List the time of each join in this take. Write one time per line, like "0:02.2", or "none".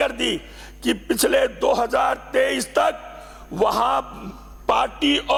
none